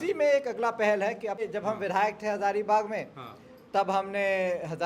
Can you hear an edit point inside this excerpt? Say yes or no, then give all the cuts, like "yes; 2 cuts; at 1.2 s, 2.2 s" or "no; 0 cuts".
yes; 1 cut; at 1.4 s